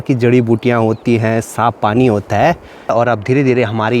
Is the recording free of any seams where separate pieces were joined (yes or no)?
no